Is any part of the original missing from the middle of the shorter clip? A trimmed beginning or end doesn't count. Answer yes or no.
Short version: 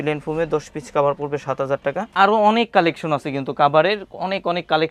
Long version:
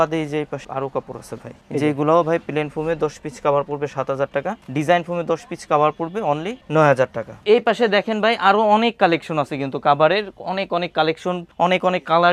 yes